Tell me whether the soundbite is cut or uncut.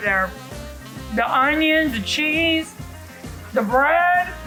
uncut